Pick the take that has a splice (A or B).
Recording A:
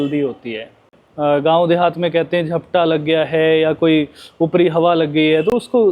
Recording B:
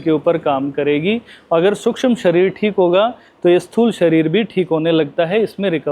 A